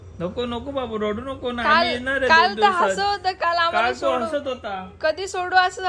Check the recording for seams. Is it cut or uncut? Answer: uncut